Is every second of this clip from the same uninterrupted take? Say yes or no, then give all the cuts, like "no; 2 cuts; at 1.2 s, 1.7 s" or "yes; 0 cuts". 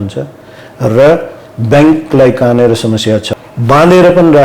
no; 1 cut; at 3.3 s